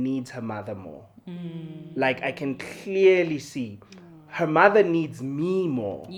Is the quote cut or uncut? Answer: uncut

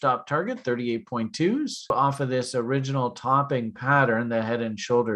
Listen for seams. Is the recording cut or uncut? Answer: cut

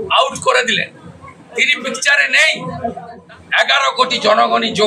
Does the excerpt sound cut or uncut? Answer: cut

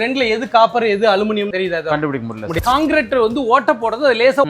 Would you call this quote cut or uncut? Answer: cut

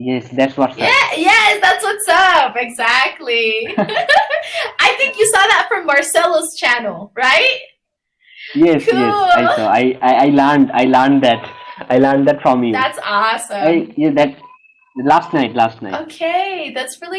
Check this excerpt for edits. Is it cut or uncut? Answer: uncut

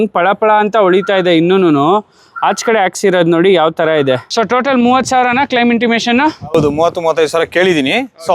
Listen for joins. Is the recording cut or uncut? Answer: cut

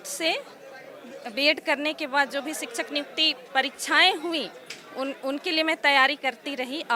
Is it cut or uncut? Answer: uncut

